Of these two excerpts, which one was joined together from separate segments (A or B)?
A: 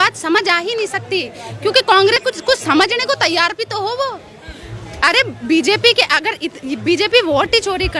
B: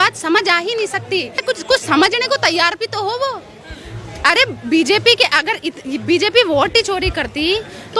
B